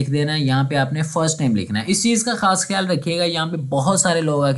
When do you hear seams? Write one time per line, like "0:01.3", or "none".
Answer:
none